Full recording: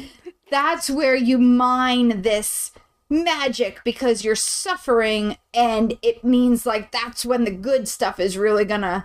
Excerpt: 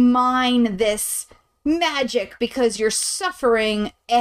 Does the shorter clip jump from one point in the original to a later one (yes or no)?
no